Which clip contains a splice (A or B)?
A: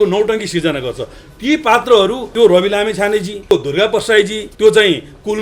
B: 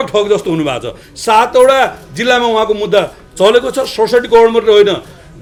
A